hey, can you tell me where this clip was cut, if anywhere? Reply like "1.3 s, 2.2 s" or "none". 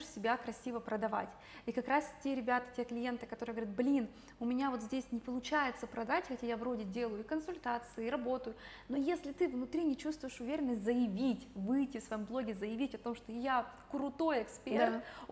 none